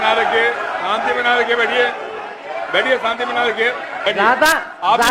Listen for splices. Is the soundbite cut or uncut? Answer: cut